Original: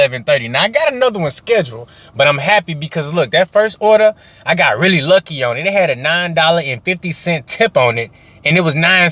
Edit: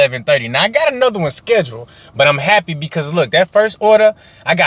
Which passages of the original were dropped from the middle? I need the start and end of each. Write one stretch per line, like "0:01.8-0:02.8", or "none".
none